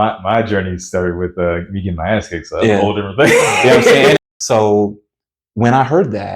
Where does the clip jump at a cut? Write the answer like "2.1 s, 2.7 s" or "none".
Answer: 4.2 s